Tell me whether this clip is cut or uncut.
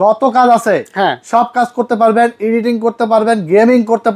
uncut